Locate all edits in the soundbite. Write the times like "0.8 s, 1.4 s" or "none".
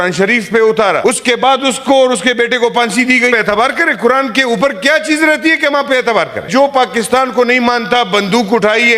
1.0 s, 3.3 s, 6.5 s